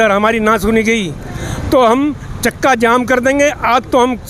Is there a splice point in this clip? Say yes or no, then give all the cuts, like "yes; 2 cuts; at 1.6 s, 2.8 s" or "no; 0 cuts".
no; 0 cuts